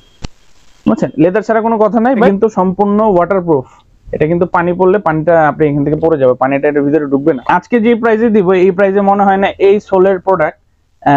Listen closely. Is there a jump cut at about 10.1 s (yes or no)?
no